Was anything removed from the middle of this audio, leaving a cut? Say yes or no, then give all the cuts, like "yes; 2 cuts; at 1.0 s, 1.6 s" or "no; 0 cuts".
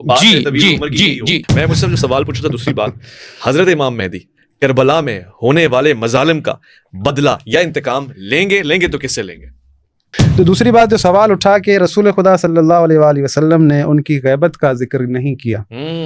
yes; 2 cuts; at 1.4 s, 10.2 s